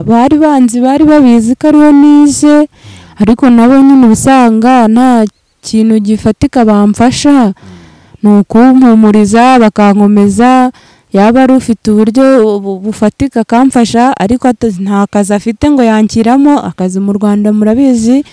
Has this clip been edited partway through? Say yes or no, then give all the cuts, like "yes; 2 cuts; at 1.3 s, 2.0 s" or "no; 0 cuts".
no; 0 cuts